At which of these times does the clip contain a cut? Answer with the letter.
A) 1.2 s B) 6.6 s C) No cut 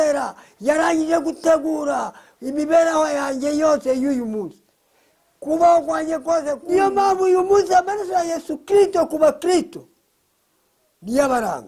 B